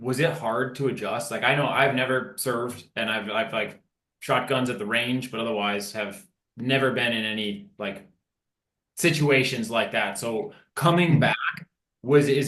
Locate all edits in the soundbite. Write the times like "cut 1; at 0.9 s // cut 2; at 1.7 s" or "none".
none

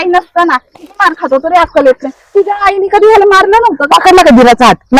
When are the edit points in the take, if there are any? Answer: none

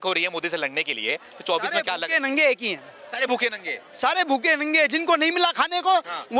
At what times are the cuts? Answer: none

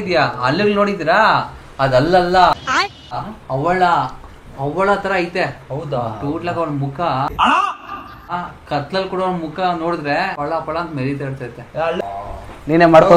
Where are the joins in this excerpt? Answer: cut 1; at 12.0 s

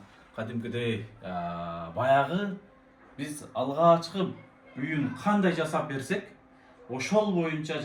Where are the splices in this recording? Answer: none

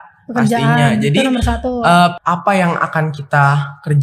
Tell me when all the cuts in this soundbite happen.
cut 1; at 2.2 s

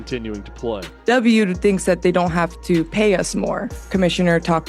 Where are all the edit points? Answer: cut 1; at 0.9 s // cut 2; at 3.8 s

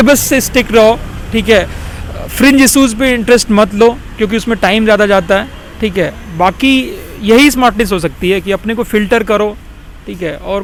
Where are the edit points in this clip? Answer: none

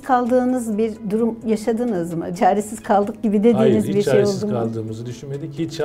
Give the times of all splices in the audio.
cut 1; at 1.0 s // cut 2; at 2.3 s

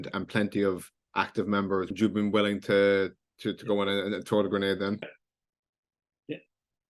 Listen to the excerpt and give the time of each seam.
cut 1; at 1.9 s // cut 2; at 5.0 s

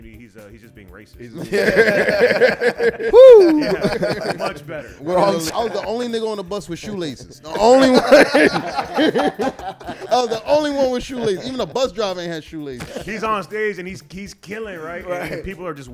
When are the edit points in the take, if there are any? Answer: cut 1; at 5.5 s // cut 2; at 12.9 s

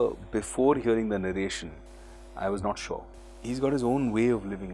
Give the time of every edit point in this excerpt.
cut 1; at 3.2 s

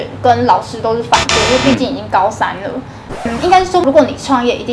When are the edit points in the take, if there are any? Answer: cut 1; at 2.9 s

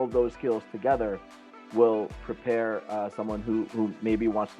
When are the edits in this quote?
cut 1; at 2.2 s

